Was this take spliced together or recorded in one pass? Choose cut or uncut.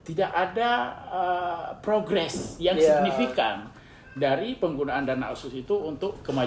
uncut